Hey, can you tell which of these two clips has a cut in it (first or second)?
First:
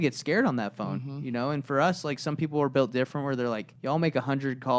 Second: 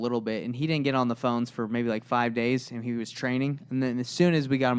first